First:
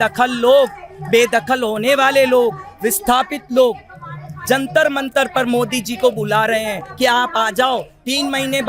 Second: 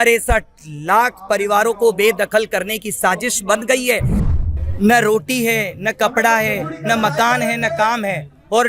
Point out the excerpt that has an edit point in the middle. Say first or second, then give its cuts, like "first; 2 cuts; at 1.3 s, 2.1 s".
second; 1 cut; at 4.2 s